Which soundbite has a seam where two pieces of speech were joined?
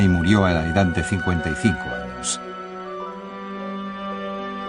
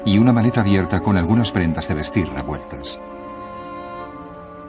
second; 1 cut; at 2.0 s

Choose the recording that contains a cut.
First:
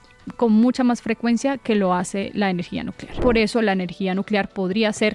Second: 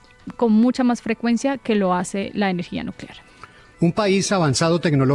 first; 1 cut; at 3.2 s

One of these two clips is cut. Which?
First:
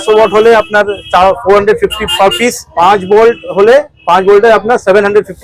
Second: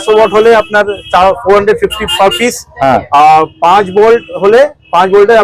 first; 1 cut; at 2.7 s

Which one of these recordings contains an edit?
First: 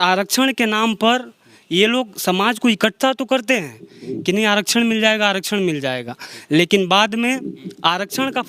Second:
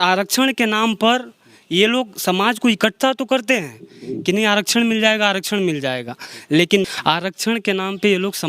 second; 1 cut; at 6.9 s

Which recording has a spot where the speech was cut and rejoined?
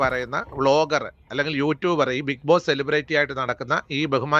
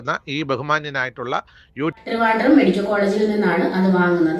second; 1 cut; at 2.0 s

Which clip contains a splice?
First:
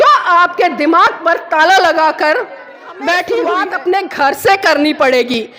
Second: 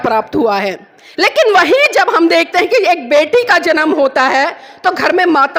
first; 1 cut; at 3.6 s

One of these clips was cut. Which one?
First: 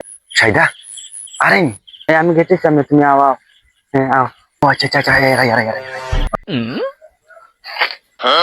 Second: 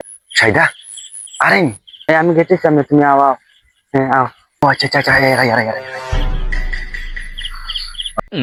first; 1 cut; at 6.3 s

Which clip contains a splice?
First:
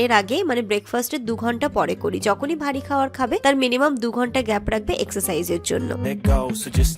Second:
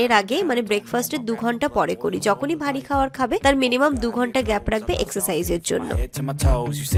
first; 1 cut; at 6.1 s

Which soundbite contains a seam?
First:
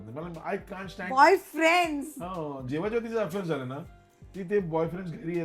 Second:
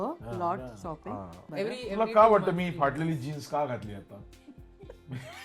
second; 1 cut; at 1.4 s

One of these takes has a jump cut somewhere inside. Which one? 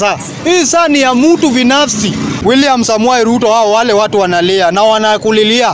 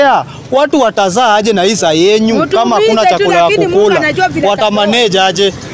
first; 1 cut; at 2.4 s

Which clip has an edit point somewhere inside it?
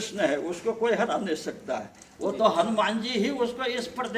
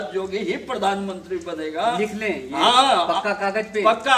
first; 1 cut; at 2.0 s

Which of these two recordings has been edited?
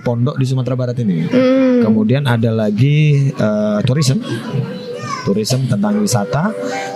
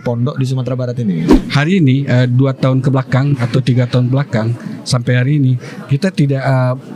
second; 1 cut; at 1.3 s

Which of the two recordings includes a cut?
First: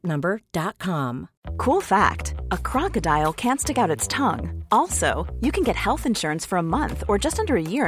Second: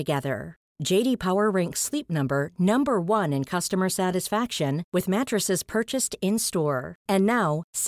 first; 1 cut; at 1.3 s

